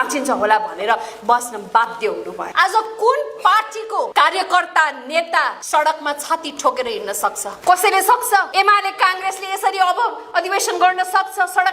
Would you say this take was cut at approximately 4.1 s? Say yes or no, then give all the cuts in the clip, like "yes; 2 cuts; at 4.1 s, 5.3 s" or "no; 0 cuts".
yes; 5 cuts; at 2.4 s, 4.1 s, 5.6 s, 7.5 s, 8.5 s